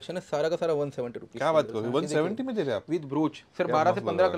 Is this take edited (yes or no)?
no